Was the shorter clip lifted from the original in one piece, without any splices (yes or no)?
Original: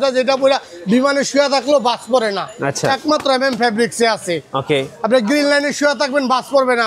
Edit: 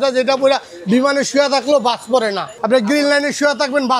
no